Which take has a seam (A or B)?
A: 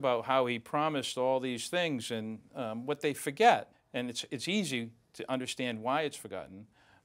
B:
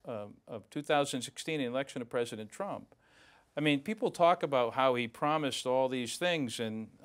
A